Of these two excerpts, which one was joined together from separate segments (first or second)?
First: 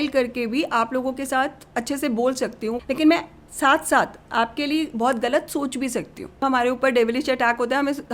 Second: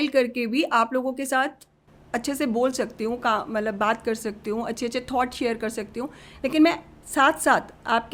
first